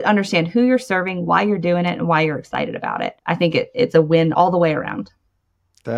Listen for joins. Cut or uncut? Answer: cut